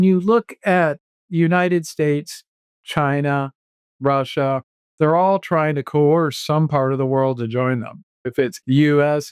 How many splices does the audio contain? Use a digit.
2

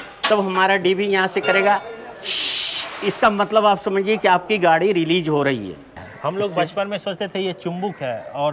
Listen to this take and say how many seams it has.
1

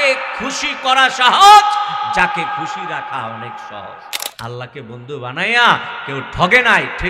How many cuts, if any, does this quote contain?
1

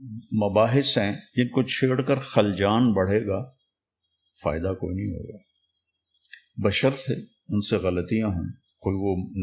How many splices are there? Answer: 1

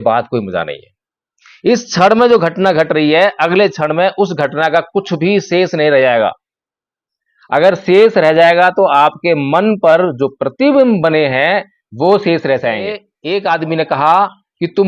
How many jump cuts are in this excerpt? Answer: 1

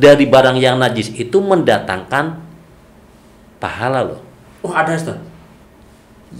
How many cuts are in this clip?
0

